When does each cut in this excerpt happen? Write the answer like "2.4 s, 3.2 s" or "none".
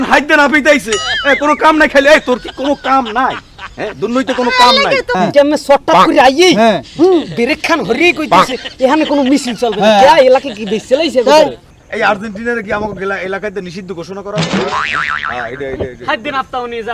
5.1 s, 11.7 s